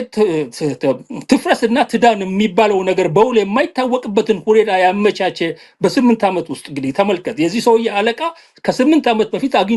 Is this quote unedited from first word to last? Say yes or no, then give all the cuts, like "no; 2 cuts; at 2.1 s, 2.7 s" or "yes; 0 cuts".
yes; 0 cuts